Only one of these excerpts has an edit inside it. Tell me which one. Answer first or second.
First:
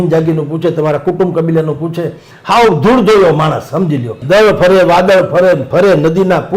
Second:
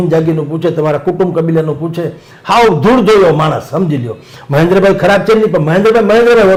first